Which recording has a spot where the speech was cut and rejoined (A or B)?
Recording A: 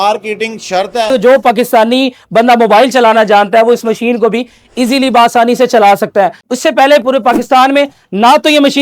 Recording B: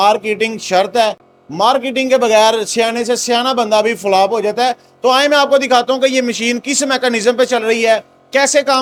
A